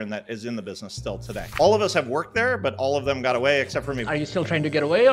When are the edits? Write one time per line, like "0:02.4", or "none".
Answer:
0:04.0